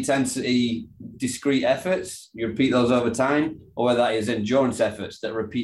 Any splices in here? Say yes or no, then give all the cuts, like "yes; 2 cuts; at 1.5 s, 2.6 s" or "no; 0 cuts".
no; 0 cuts